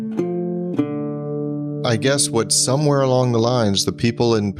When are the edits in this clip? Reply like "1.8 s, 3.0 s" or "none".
1.7 s

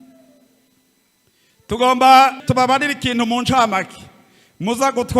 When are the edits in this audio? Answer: 2.4 s

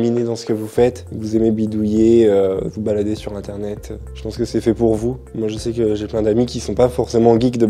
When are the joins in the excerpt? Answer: 5.3 s

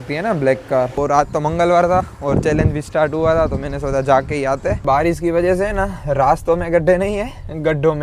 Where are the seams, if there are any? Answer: 1.0 s, 4.8 s

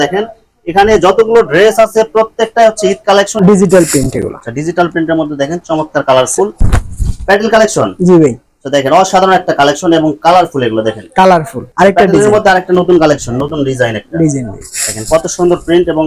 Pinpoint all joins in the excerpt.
3.3 s, 6.5 s, 11.6 s

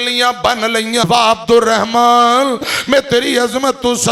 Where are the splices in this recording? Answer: 1.0 s

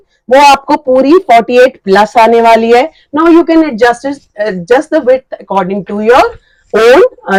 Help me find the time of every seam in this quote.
none

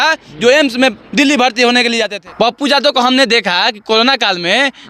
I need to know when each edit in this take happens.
2.1 s

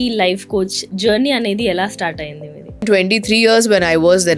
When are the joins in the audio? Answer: 2.8 s

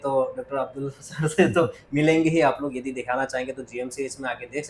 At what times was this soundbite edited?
none

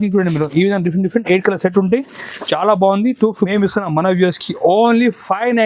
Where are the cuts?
3.5 s

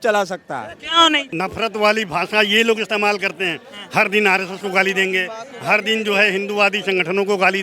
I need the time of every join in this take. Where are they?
1.3 s

